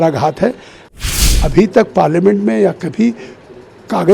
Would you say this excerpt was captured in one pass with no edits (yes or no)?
no